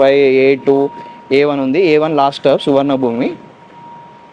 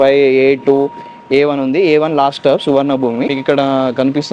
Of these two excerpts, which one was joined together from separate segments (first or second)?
second